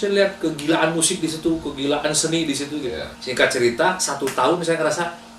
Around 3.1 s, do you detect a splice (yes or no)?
yes